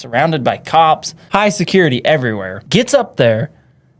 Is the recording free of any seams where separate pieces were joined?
no; 2 cuts; at 1.2 s, 2.5 s

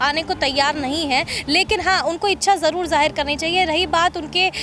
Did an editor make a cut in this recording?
no; 0 cuts

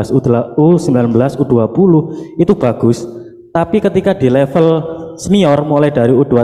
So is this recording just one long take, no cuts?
yes; 0 cuts

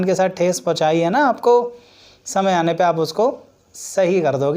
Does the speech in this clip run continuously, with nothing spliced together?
yes; 0 cuts

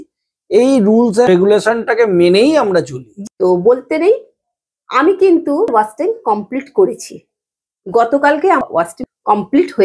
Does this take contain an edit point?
yes; 4 cuts; at 1.3 s, 3.0 s, 5.7 s, 8.7 s

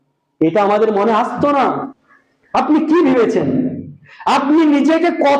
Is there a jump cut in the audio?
yes; 1 cut; at 1.9 s

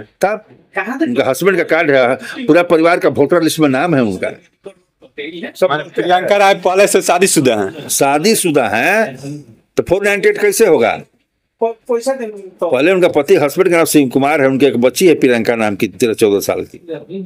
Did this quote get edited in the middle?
no; 0 cuts

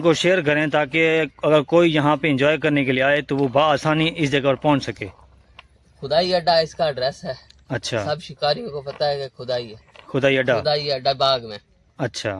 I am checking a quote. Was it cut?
no; 0 cuts

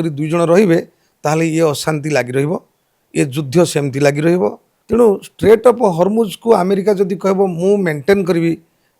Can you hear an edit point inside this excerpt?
yes; 1 cut; at 4.7 s

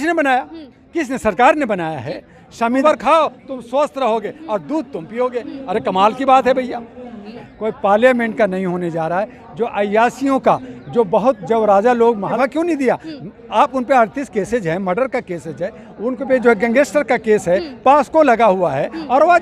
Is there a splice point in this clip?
yes; 4 cuts; at 2.8 s, 7.3 s, 8.6 s, 12.3 s

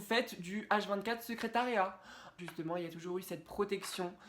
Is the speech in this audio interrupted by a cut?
yes; 1 cut; at 2.3 s

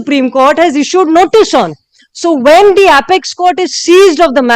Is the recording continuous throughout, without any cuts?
yes; 0 cuts

